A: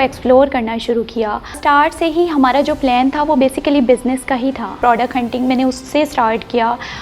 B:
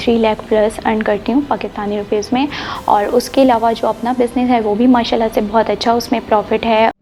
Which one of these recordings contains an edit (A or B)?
A